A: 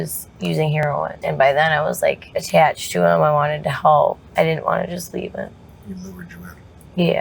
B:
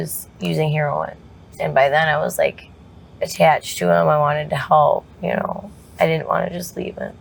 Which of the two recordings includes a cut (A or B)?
A